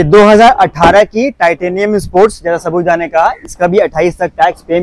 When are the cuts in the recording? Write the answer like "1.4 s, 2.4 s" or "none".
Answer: none